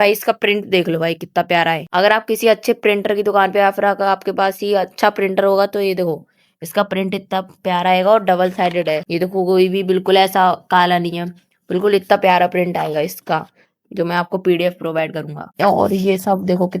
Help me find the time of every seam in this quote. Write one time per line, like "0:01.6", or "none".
0:15.5